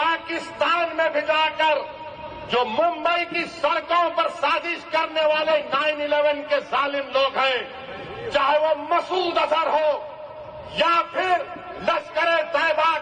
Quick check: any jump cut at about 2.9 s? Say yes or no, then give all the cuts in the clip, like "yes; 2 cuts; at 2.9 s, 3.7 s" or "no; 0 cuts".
no; 0 cuts